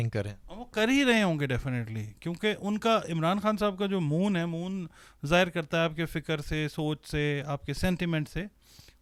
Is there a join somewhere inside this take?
no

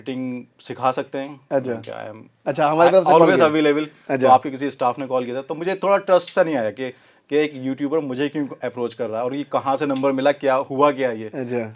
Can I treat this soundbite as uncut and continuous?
yes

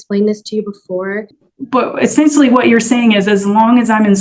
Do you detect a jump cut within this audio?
yes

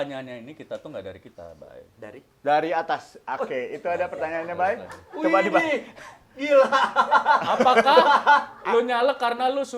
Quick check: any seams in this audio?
no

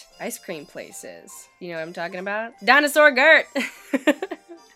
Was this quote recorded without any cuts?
no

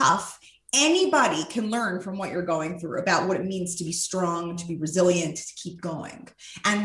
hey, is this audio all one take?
yes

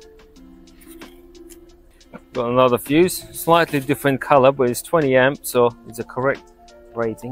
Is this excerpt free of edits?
yes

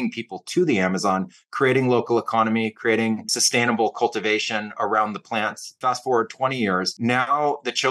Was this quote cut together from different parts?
yes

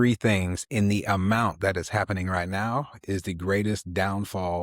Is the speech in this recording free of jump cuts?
yes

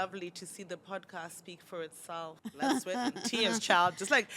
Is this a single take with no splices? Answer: no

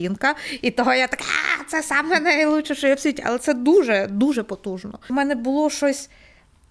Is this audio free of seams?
no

